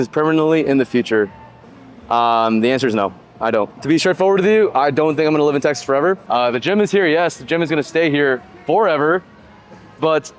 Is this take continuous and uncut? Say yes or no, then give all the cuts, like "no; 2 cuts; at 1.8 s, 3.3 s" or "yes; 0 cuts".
yes; 0 cuts